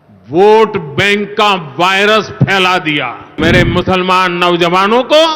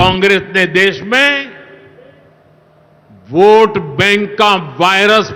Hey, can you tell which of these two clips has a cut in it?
first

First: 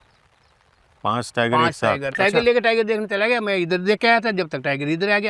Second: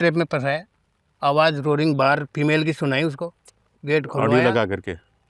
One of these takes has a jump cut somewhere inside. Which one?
first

